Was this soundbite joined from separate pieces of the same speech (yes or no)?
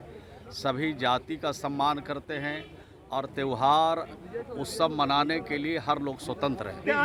no